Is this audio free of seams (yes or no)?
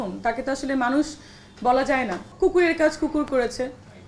no